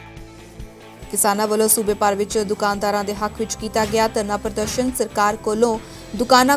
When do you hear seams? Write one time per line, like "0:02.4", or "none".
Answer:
0:00.9